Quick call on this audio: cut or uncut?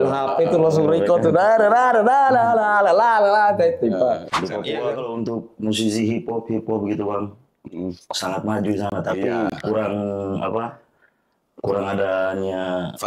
cut